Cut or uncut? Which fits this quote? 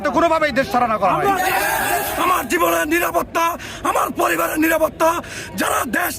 cut